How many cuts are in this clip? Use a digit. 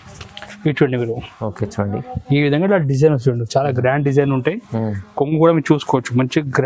0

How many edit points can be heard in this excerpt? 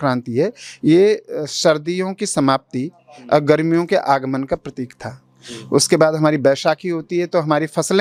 0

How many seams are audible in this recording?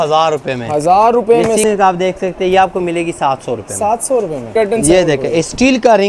2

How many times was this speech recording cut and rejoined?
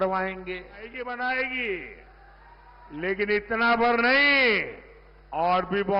1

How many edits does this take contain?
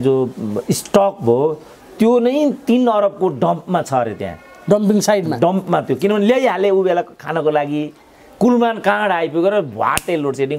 0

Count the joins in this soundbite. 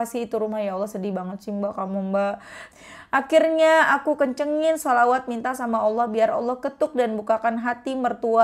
1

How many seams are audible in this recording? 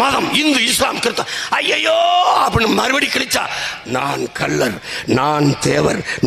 0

